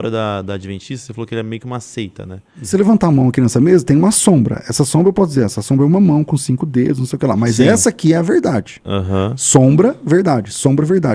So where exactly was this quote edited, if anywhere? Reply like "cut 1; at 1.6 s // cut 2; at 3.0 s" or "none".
cut 1; at 2.7 s

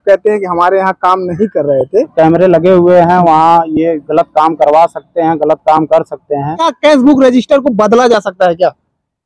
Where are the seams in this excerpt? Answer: cut 1; at 2.1 s // cut 2; at 6.7 s

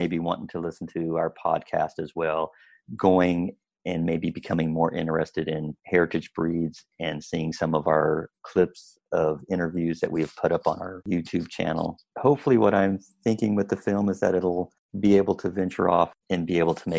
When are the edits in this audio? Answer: cut 1; at 11.0 s // cut 2; at 12.1 s

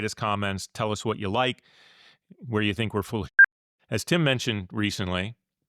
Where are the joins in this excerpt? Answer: cut 1; at 3.5 s

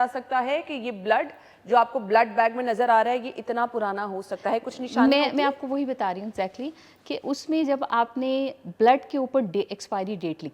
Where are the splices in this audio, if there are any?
none

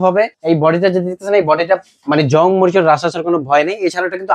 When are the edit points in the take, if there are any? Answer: none

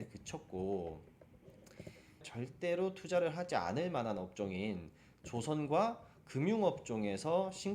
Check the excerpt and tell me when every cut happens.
cut 1; at 2.3 s

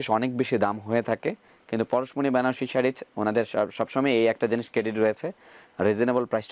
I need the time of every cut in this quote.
none

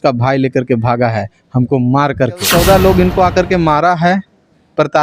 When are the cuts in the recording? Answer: cut 1; at 2.5 s

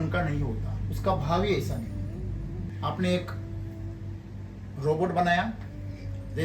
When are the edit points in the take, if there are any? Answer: cut 1; at 2.7 s

